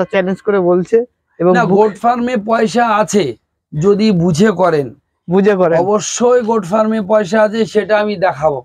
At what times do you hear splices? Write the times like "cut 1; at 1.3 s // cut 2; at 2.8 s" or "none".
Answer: none